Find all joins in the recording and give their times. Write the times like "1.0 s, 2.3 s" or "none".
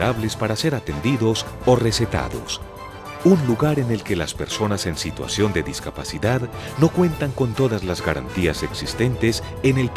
none